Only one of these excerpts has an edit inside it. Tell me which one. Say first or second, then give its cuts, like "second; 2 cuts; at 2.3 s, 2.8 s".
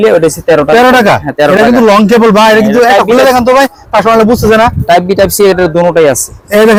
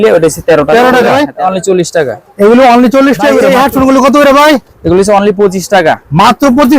second; 2 cuts; at 1.1 s, 3.4 s